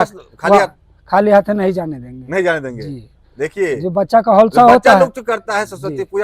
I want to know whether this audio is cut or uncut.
uncut